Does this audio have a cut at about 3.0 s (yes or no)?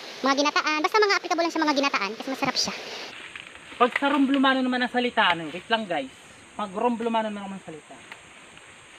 yes